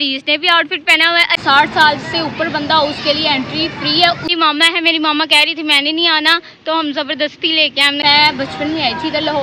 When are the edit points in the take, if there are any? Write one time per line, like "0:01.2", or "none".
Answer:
0:01.4
0:04.2
0:08.0